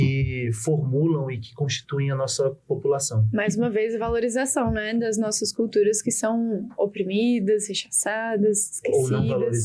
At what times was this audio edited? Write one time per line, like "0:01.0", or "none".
none